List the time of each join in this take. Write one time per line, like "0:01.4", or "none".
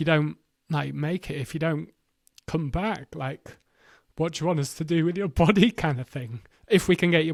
none